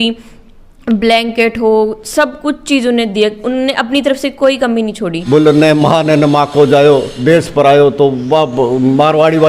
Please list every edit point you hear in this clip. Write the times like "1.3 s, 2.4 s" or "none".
5.1 s

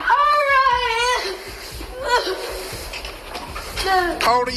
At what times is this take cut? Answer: 1.9 s

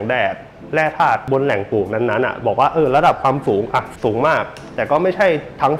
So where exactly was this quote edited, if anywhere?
1.2 s, 3.9 s

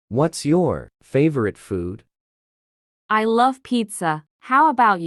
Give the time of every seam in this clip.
none

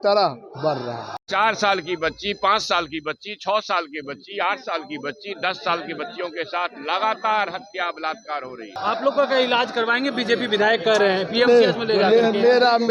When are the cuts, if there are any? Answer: 1.1 s, 8.7 s

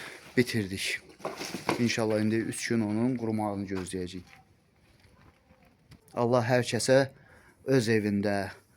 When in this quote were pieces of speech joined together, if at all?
6.0 s

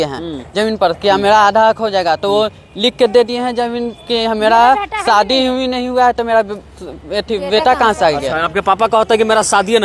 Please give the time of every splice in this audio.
none

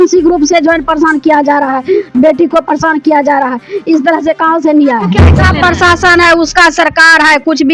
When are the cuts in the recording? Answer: 5.4 s

